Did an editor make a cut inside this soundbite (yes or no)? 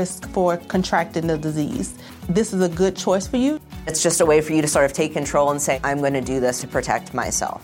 no